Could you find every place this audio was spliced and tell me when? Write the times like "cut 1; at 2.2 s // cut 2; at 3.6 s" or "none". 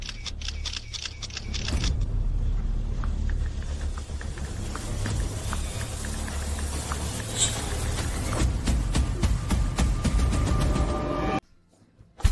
cut 1; at 11.4 s